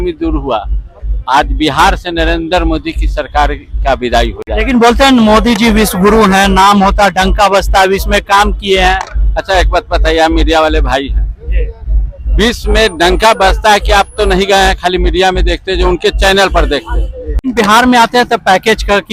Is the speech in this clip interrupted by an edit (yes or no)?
no